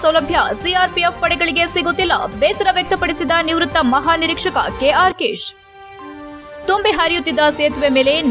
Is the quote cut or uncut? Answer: uncut